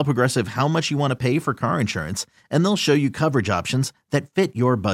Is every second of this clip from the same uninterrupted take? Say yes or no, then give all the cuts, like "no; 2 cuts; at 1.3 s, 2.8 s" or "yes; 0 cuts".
yes; 0 cuts